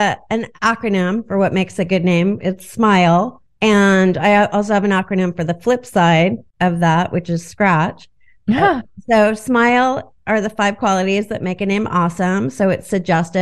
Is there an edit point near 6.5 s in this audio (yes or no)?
yes